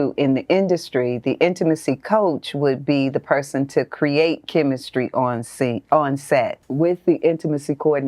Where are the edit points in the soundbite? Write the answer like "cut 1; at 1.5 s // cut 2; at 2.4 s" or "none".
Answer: cut 1; at 6.6 s